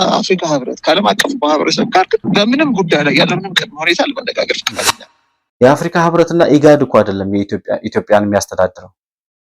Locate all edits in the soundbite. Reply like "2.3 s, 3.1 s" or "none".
4.9 s